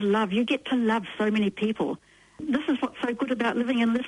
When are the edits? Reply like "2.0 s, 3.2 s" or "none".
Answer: none